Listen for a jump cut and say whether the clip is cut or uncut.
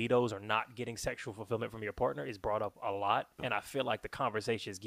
cut